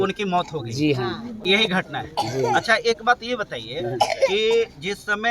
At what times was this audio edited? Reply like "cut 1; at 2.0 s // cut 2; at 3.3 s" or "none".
none